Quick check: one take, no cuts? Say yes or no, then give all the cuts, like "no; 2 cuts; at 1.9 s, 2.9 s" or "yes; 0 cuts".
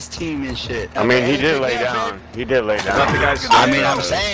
no; 1 cut; at 0.9 s